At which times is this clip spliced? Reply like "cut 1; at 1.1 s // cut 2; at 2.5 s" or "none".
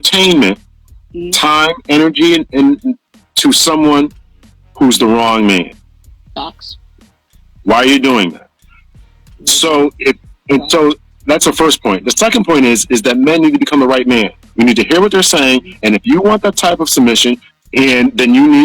cut 1; at 17.5 s